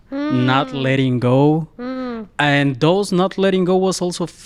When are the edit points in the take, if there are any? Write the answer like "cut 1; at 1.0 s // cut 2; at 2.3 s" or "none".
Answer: none